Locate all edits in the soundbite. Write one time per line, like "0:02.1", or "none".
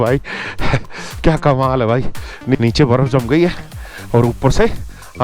0:02.5